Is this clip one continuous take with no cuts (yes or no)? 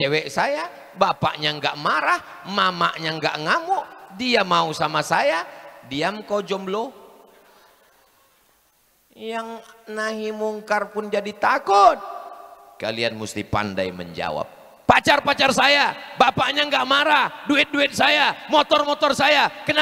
yes